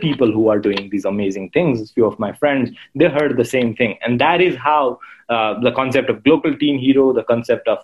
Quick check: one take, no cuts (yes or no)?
yes